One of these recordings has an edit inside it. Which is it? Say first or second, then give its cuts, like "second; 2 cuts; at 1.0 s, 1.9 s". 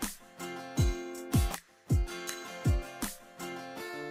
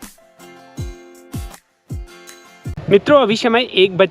second; 1 cut; at 3.0 s